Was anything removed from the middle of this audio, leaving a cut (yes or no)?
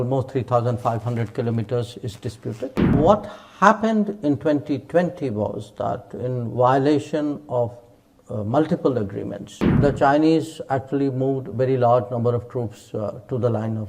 yes